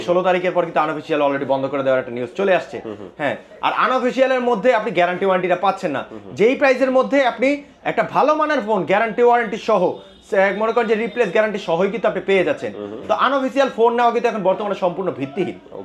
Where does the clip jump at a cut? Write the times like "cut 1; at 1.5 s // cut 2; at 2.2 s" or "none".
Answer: none